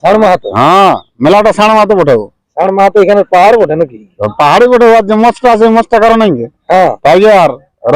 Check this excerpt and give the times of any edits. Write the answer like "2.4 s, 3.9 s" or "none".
7.0 s